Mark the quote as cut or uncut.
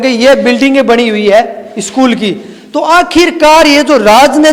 uncut